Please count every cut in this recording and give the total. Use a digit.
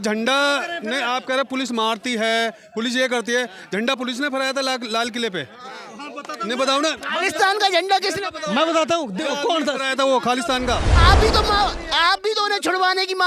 1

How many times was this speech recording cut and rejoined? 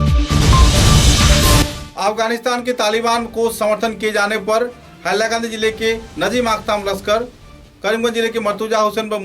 1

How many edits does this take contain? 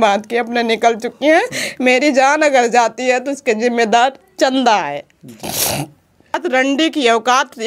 1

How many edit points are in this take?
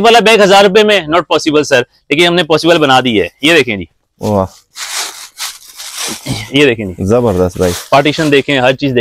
0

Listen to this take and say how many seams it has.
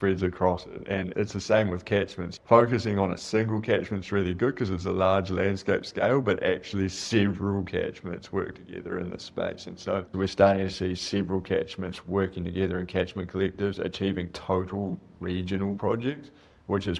2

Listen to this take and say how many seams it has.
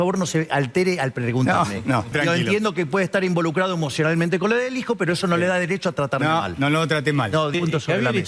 2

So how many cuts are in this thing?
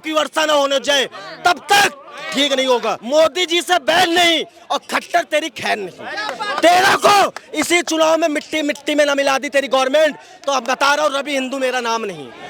1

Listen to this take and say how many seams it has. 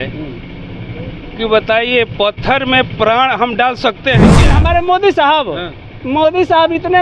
1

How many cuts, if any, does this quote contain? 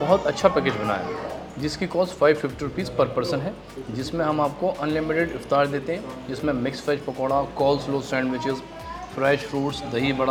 0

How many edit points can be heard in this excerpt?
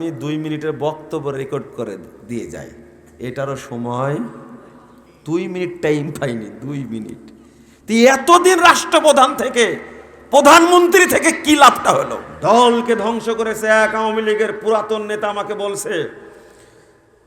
1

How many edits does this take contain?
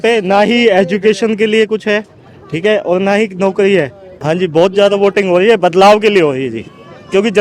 1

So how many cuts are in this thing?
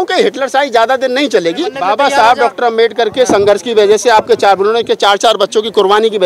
1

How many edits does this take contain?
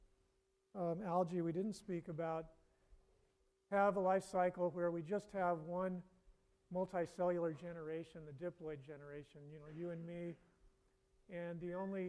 1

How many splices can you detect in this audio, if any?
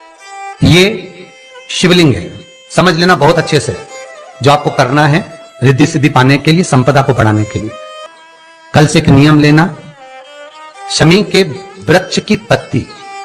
1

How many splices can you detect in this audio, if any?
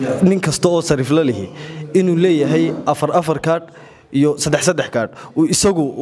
0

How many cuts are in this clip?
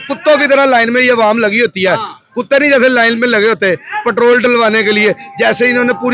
0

